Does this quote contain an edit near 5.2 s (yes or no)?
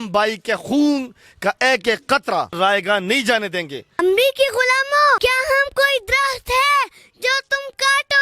yes